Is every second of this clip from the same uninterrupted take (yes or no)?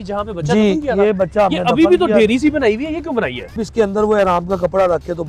no